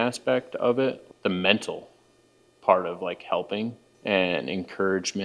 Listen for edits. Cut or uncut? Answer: cut